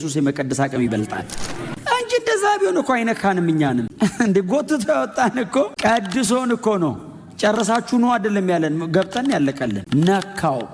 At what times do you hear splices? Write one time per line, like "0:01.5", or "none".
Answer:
0:01.7